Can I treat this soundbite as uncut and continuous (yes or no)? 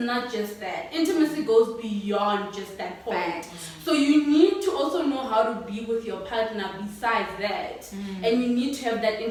yes